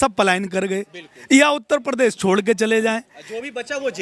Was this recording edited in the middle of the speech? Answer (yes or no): no